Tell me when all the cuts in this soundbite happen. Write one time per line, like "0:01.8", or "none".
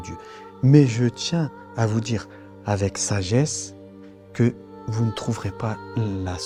none